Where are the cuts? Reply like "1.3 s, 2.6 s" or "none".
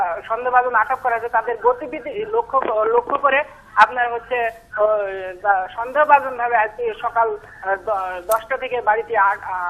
7.7 s